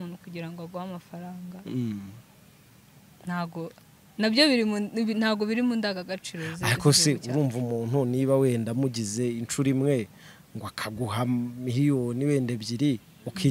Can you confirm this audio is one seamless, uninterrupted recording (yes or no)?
yes